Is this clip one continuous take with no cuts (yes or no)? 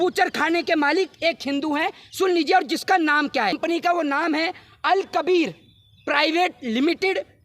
no